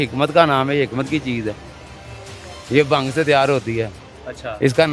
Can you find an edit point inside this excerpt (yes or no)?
no